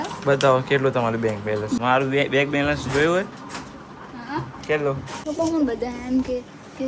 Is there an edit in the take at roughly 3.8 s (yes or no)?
no